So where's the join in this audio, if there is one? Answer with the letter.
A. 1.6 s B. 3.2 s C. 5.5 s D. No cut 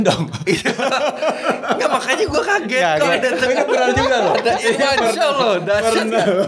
D